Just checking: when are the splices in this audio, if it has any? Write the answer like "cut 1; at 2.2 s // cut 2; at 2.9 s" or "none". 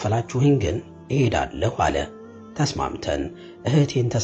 none